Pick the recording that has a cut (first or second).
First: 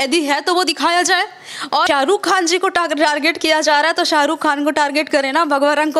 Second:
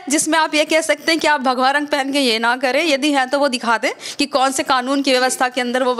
first